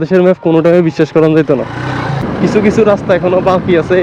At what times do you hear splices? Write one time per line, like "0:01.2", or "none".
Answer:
0:02.3